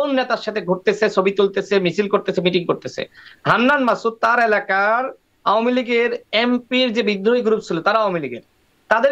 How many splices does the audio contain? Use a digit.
0